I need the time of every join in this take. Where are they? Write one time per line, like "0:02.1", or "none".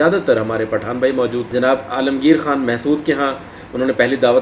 0:01.5